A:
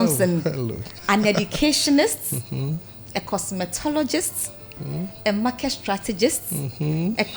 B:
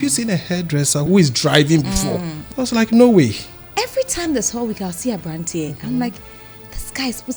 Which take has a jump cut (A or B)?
B